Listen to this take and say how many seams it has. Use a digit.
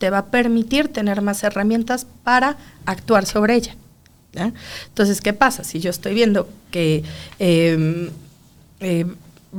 0